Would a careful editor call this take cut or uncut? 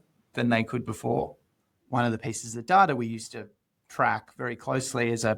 cut